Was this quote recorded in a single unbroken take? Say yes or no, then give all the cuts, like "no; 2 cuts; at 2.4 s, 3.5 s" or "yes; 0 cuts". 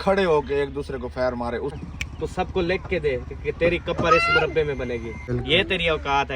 no; 2 cuts; at 1.8 s, 5.3 s